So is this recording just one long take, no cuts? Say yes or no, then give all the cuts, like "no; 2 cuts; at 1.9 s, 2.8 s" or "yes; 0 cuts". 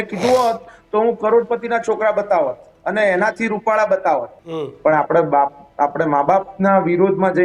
no; 1 cut; at 4.3 s